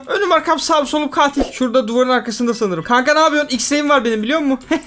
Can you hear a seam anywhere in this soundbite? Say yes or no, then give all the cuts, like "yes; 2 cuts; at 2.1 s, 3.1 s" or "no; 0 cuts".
yes; 1 cut; at 1.5 s